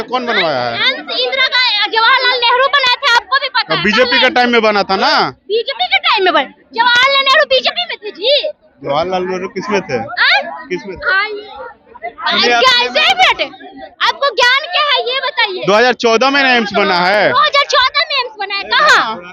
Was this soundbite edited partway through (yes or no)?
no